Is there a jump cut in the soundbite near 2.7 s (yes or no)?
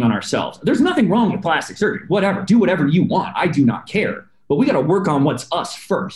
no